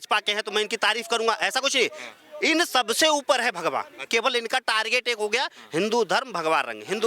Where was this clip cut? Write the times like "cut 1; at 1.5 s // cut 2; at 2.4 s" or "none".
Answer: cut 1; at 4.0 s